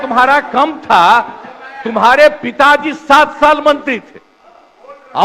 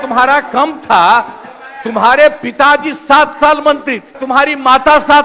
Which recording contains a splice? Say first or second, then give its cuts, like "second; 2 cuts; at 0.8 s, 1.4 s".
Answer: second; 1 cut; at 4.2 s